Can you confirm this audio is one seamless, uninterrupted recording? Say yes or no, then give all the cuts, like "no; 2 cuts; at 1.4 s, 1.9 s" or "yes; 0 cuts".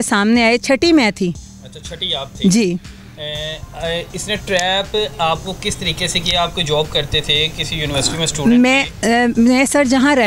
yes; 0 cuts